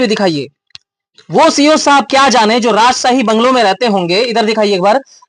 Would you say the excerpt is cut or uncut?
uncut